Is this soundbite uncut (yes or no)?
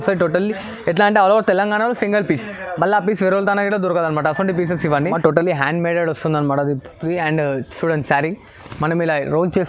no